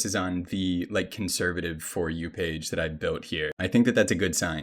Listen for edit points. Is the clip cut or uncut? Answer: cut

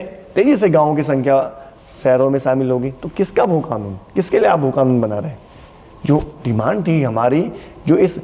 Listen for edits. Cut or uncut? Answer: uncut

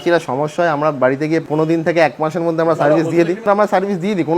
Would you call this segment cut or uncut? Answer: cut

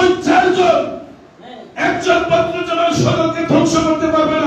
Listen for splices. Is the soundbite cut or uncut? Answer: uncut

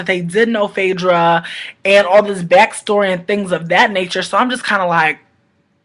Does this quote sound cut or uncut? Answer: uncut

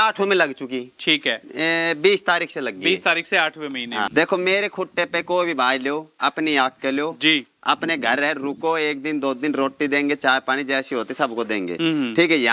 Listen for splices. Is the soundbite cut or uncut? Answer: cut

